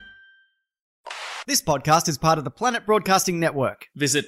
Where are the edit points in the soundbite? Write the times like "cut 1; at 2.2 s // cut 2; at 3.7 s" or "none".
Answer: cut 1; at 1.0 s